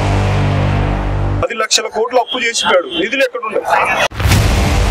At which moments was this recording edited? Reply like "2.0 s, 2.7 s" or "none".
none